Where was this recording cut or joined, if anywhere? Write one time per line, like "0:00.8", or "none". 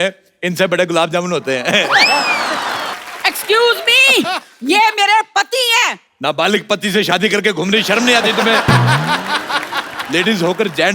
0:02.9